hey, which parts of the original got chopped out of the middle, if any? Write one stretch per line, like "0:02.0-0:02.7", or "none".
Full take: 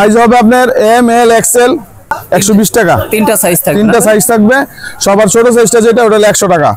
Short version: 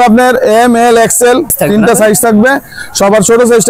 0:01.9-0:03.6